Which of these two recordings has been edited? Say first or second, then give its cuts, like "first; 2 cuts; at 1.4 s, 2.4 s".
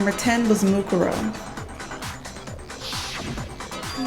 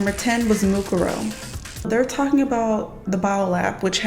second; 1 cut; at 1.9 s